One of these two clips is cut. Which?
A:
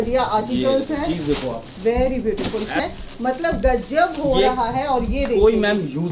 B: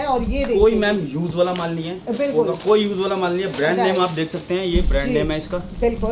A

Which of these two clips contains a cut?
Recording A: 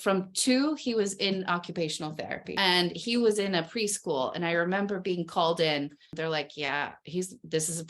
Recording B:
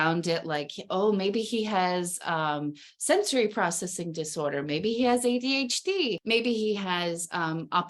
A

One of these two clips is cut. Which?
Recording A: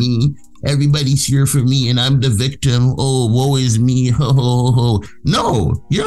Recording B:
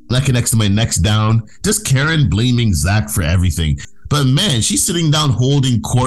B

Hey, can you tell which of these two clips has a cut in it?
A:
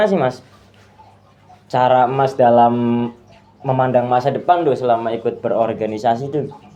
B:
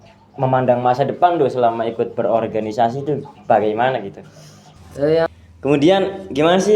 B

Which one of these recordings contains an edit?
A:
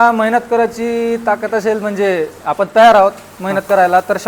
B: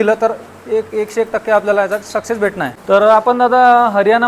B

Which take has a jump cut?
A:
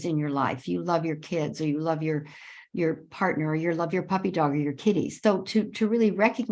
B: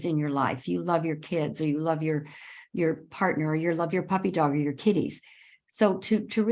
A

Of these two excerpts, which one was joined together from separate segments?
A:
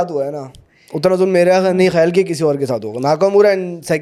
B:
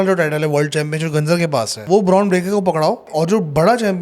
B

